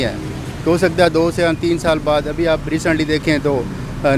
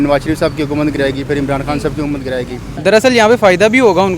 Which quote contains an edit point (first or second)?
second